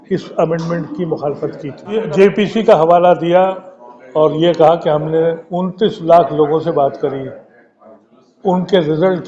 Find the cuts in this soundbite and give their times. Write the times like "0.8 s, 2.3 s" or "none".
2.1 s